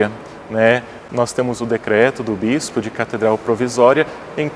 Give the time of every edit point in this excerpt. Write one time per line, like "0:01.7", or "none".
0:01.0